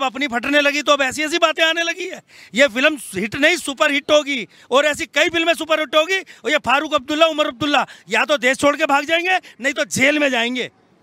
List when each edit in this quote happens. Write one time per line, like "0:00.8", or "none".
none